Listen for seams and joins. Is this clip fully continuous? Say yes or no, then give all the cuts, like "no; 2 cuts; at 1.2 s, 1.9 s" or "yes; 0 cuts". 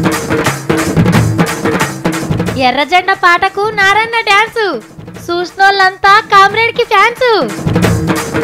no; 1 cut; at 0.9 s